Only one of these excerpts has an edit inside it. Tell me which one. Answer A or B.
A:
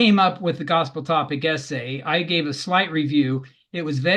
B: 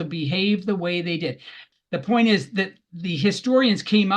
B